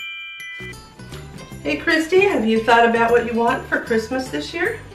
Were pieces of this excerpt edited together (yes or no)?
yes